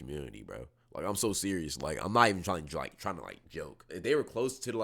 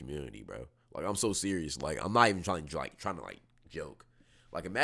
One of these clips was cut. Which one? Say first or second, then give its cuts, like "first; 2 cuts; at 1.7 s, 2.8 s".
first; 1 cut; at 3.9 s